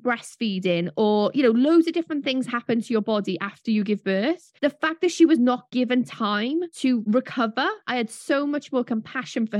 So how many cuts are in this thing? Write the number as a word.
one